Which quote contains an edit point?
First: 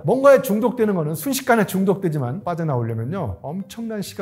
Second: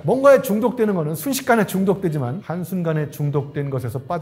first; 1 cut; at 2.4 s

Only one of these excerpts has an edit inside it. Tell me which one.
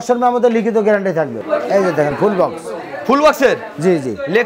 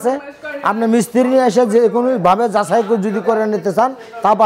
first; 1 cut; at 1.3 s

